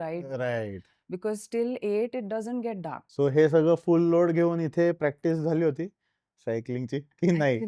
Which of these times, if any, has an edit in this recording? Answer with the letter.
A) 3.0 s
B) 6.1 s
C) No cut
A